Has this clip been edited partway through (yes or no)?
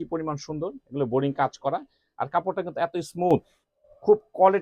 no